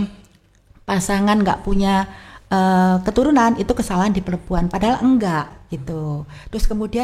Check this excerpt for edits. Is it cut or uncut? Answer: cut